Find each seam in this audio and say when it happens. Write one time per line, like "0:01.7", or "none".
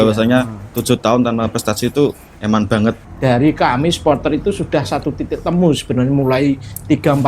0:02.3
0:03.1